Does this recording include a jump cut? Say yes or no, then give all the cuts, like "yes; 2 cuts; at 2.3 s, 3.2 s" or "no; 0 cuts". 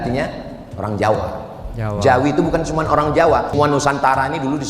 yes; 1 cut; at 3.5 s